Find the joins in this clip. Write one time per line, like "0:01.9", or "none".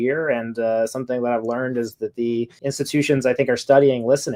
0:02.5

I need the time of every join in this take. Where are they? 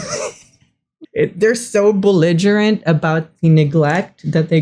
0:00.9

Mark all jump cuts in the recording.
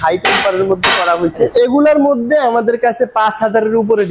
0:01.5

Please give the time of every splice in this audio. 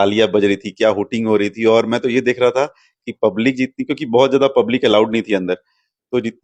none

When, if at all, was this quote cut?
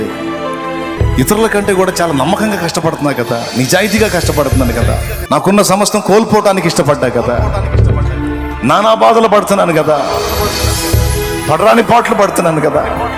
none

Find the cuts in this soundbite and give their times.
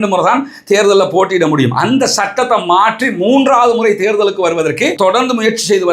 0:05.0

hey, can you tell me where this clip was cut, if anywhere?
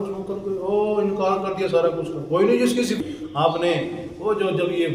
0:03.0

